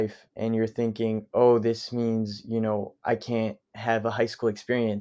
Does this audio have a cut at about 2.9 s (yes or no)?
no